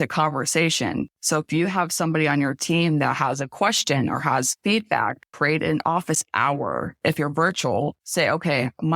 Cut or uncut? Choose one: cut